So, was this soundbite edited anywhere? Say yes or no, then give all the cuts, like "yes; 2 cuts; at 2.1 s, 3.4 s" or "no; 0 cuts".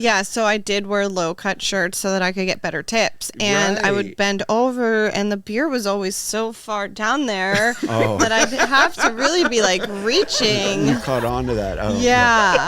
no; 0 cuts